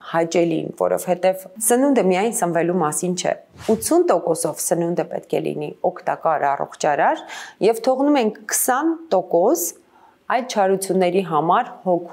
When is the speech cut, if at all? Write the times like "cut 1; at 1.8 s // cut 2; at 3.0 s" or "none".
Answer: cut 1; at 3.5 s

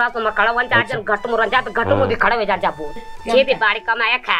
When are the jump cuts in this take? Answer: cut 1; at 3.1 s

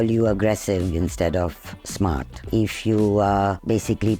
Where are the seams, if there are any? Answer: none

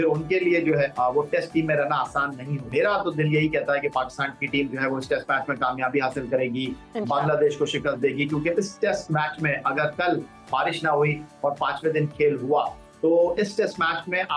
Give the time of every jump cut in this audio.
cut 1; at 0.9 s // cut 2; at 2.5 s

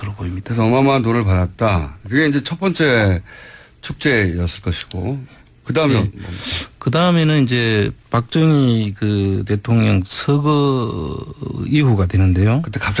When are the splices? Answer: cut 1; at 6.6 s

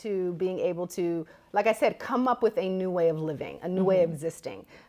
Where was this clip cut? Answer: none

